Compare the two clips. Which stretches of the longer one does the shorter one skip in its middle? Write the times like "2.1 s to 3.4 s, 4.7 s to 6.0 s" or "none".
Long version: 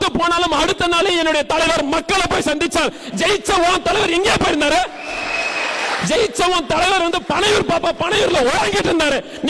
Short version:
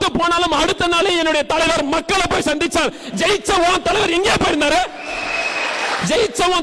none